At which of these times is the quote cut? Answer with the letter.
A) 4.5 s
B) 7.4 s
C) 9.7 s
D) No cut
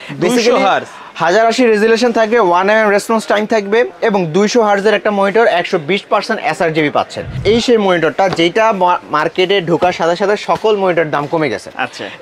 B